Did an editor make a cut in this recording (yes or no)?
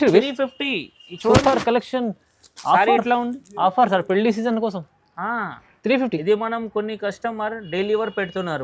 no